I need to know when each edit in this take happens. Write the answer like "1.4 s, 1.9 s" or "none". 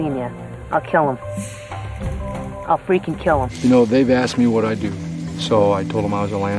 3.5 s